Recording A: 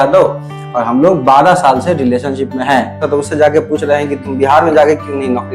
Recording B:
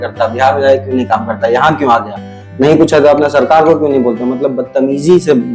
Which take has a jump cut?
A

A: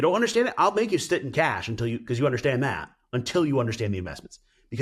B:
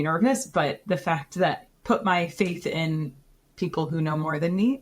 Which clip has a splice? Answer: B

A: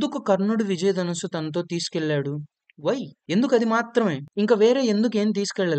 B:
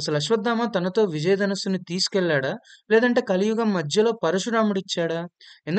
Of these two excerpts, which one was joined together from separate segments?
A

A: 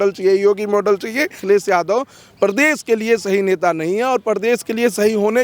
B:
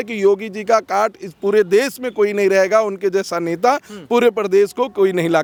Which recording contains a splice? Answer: A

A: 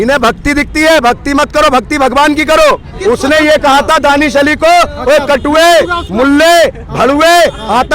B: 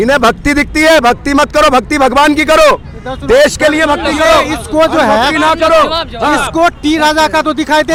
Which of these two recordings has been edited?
A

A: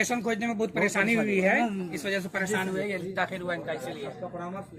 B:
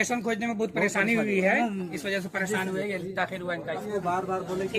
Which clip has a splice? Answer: B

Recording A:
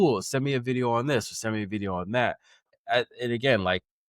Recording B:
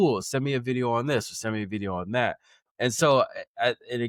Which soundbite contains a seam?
A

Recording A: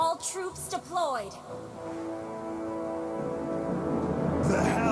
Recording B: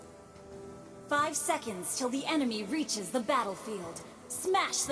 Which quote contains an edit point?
B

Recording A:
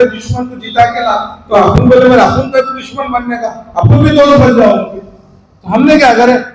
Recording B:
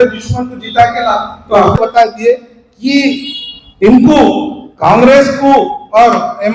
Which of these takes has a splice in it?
B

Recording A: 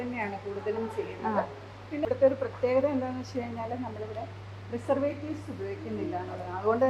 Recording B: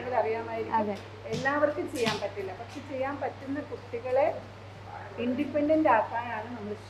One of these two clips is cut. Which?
A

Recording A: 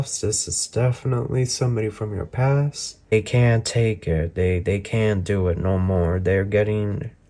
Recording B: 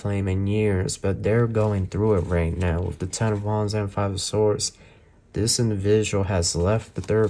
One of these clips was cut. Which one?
A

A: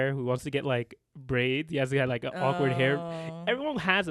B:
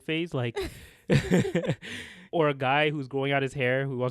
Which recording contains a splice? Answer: B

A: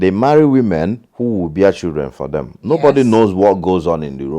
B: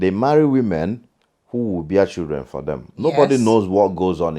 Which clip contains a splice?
A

